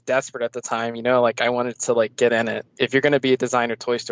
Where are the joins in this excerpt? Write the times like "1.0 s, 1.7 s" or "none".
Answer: 2.6 s